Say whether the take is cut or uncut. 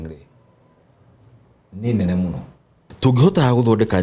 cut